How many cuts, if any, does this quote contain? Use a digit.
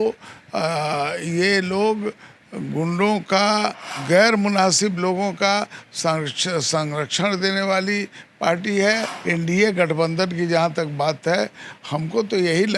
2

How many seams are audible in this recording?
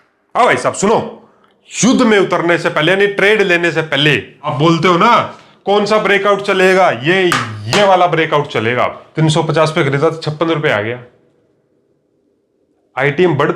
2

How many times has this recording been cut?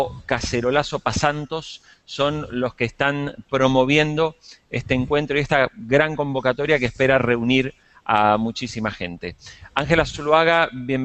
1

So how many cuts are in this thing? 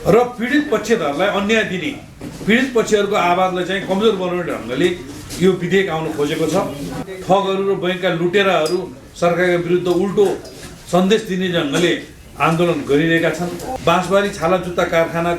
2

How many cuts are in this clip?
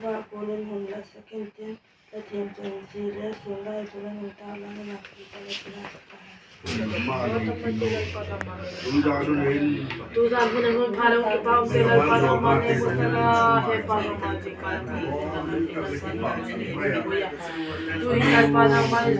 1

